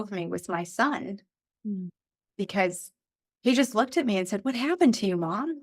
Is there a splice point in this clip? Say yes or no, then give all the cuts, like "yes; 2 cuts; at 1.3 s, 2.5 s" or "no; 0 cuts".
yes; 1 cut; at 3.3 s